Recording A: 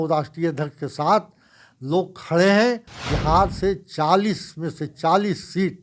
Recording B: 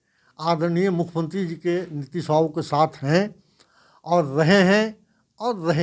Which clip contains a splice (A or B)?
A